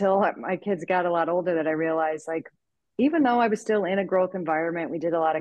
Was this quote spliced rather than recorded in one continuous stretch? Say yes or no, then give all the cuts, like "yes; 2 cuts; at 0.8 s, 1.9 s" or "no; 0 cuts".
no; 0 cuts